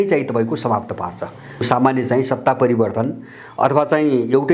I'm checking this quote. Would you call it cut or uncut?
cut